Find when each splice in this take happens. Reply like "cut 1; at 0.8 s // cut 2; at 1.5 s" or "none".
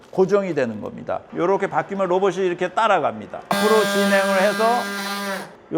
cut 1; at 1.3 s // cut 2; at 3.5 s